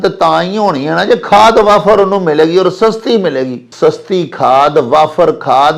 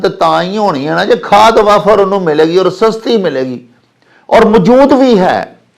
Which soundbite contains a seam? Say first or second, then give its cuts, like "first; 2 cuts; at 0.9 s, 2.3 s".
first; 1 cut; at 3.7 s